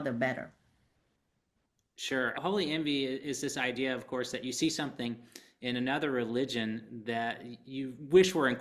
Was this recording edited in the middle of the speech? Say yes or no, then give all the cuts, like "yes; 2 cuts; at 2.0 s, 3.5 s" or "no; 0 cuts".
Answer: no; 0 cuts